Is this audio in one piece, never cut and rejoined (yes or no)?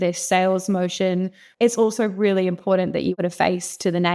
no